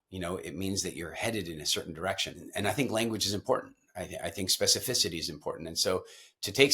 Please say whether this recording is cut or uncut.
cut